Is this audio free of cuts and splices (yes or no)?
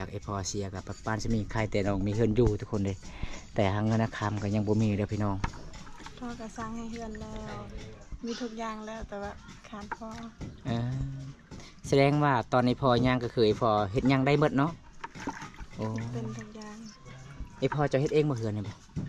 yes